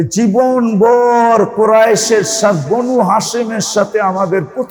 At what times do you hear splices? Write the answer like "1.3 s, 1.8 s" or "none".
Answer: none